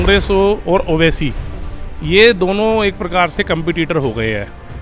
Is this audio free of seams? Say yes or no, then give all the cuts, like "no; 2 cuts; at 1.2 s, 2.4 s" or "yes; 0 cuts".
yes; 0 cuts